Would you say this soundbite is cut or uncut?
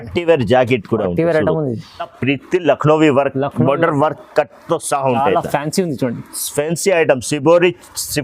cut